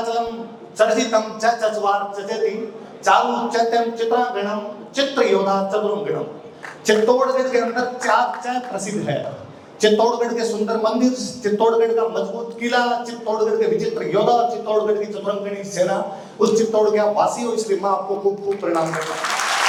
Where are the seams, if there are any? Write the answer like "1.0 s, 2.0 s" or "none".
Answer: none